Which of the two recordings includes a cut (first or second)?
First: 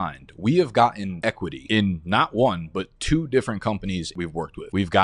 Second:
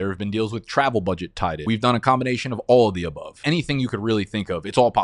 second